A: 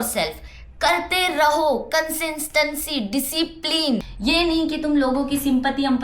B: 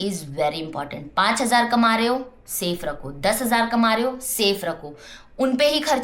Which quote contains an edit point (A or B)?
A